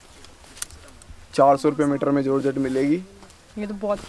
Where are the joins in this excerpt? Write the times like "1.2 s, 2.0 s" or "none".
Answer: 1.3 s